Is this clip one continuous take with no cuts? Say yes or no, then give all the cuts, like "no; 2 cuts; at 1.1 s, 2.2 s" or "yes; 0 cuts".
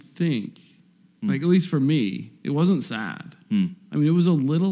yes; 0 cuts